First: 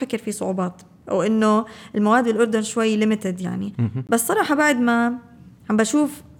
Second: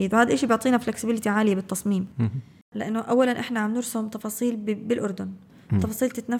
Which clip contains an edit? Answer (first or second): second